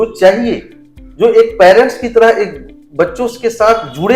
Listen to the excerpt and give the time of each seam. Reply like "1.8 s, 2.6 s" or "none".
none